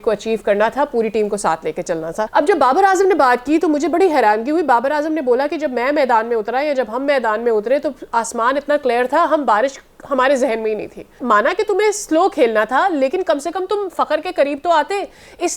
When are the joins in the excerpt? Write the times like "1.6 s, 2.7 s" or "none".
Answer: 2.3 s, 11.2 s